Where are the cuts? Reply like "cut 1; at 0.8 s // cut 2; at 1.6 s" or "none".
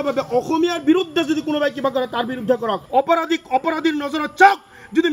cut 1; at 2.8 s